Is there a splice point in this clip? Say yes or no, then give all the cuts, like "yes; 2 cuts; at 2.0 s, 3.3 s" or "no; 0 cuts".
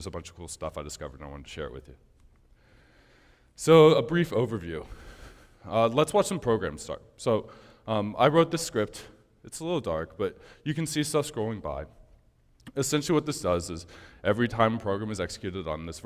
no; 0 cuts